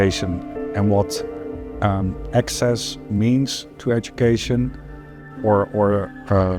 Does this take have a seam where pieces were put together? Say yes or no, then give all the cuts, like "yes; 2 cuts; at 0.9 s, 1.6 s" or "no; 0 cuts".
no; 0 cuts